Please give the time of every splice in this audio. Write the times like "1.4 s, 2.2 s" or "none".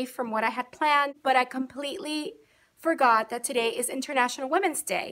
1.2 s

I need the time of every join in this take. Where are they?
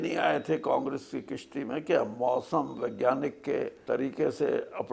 3.8 s

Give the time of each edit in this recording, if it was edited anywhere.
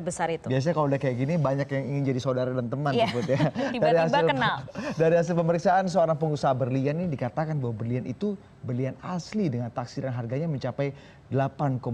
3.2 s

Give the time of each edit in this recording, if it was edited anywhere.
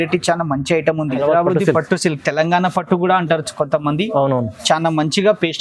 1.2 s

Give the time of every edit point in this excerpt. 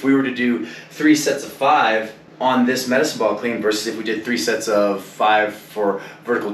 2.2 s

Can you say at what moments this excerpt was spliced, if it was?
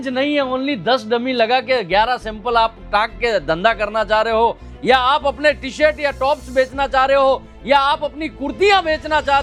none

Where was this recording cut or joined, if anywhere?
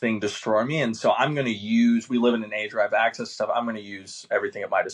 none

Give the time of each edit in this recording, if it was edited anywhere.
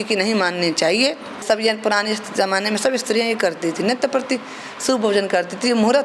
1.4 s

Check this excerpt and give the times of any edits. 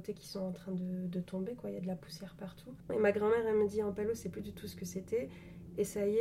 2.9 s

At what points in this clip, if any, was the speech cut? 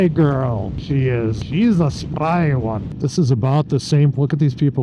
1.0 s, 2.9 s

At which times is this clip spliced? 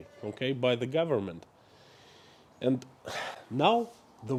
none

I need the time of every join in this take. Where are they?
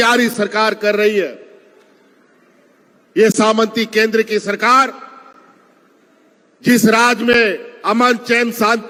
none

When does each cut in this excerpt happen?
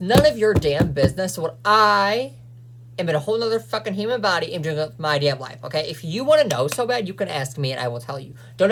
none

